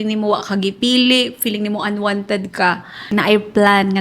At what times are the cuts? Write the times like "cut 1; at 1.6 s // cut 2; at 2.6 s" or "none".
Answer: cut 1; at 3.0 s